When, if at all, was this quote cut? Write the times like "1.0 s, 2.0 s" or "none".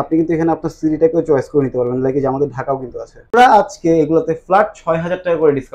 3.3 s

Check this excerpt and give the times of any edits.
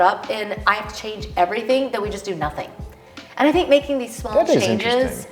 none

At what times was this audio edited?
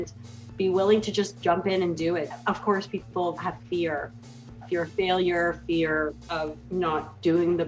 2.3 s, 3.4 s, 4.6 s

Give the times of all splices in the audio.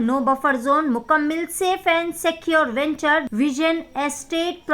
3.3 s

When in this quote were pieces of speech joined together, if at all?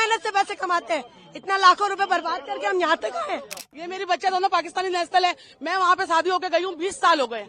3.7 s

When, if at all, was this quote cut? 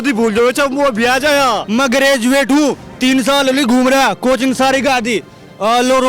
1.6 s

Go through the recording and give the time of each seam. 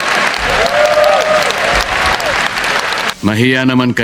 3.1 s

